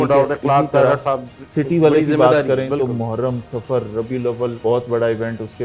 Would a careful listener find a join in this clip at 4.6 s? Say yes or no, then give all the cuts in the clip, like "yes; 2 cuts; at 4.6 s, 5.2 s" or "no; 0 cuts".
yes; 1 cut; at 4.6 s